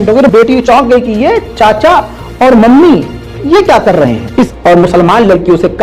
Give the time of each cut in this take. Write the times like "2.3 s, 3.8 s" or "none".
4.5 s